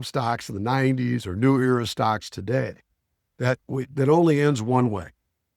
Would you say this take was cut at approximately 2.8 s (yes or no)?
no